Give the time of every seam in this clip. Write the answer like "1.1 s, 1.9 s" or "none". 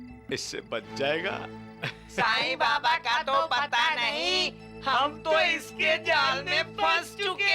none